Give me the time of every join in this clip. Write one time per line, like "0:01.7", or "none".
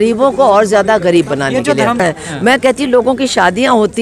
0:02.0